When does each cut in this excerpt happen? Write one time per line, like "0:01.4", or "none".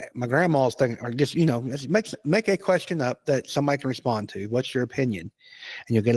none